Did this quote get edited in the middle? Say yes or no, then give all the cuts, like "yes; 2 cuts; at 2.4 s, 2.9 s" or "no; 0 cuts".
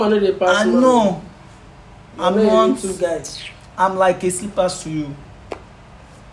no; 0 cuts